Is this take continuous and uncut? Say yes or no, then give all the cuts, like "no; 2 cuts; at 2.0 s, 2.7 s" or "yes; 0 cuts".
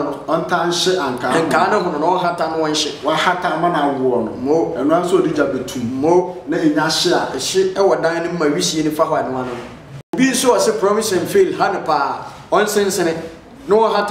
no; 1 cut; at 10.1 s